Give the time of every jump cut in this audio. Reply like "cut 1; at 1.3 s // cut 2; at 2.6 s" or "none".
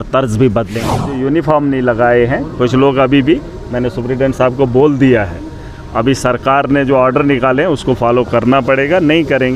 cut 1; at 1.2 s